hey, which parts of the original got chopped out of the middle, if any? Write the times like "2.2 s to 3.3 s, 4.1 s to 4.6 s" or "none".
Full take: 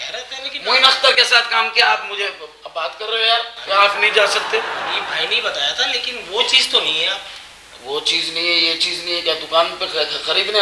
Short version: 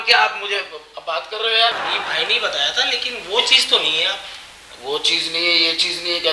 3.5 s to 4.8 s